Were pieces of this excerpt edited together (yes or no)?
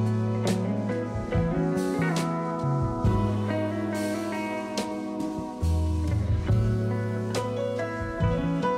no